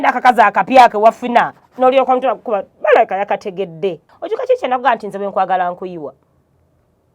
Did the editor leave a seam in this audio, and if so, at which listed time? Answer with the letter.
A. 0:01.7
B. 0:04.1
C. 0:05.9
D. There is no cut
B